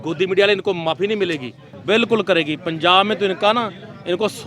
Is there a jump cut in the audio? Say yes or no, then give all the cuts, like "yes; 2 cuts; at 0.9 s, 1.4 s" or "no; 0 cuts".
yes; 1 cut; at 1.7 s